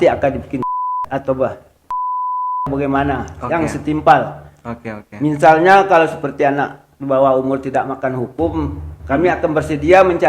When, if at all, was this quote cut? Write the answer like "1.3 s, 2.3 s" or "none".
none

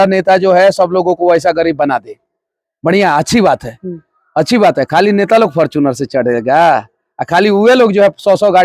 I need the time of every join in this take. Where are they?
none

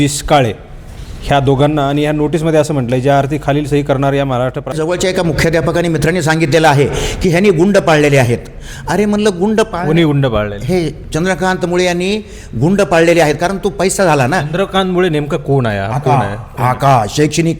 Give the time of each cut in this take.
4.7 s

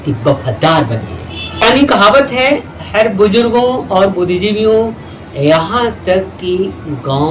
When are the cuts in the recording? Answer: 1.6 s

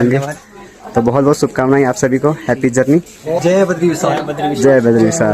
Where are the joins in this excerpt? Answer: 3.4 s

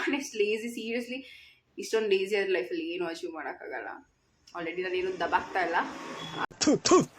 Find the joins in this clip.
none

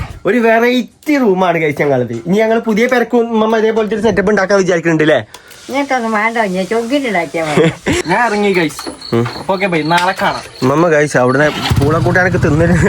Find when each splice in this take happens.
8.0 s

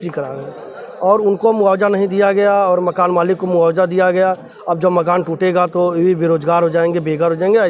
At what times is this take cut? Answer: none

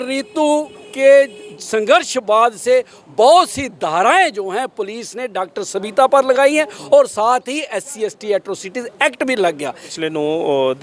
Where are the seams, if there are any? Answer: 9.9 s

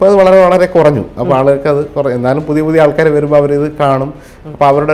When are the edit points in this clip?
none

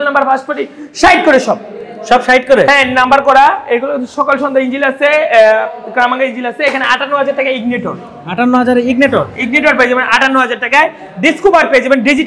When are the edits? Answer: none

